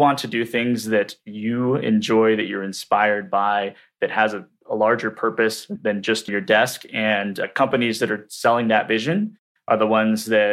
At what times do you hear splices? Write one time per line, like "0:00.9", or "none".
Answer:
0:06.3